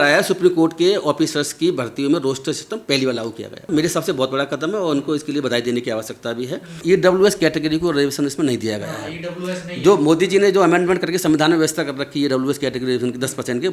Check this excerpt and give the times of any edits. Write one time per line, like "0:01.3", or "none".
0:03.7
0:06.8

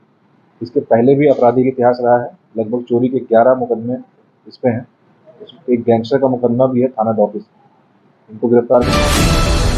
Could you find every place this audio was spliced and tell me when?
0:08.9

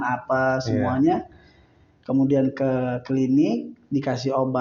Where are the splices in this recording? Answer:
none

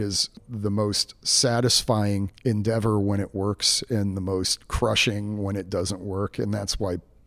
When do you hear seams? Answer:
0:02.3

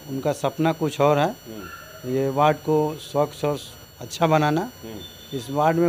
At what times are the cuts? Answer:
none

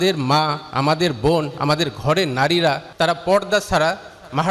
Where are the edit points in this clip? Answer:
0:02.9

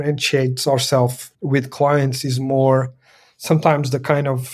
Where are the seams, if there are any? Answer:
0:01.3

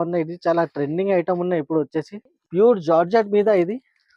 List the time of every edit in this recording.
0:02.4

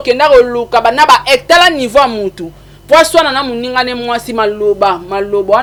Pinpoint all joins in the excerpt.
none

